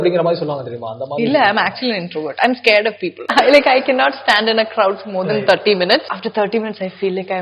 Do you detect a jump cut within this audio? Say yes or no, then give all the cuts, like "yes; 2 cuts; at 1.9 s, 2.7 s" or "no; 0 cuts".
yes; 2 cuts; at 3.3 s, 6.1 s